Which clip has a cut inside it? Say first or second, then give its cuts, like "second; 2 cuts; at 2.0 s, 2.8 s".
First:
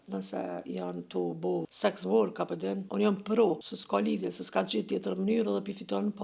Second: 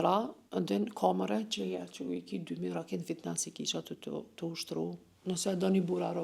first; 3 cuts; at 1.7 s, 2.8 s, 3.7 s